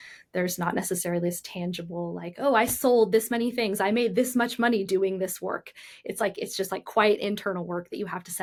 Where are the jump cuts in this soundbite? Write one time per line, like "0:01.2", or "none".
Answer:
none